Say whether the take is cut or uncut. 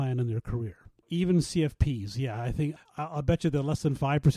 cut